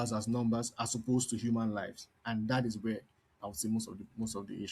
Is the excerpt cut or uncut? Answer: uncut